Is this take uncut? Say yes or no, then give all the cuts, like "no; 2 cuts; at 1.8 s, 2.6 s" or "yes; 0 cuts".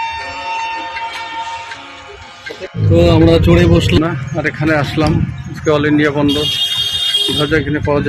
no; 1 cut; at 4.0 s